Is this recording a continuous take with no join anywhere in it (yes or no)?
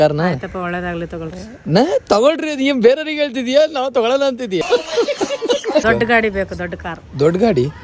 no